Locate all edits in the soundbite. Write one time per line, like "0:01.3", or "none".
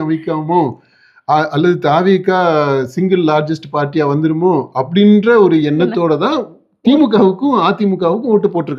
none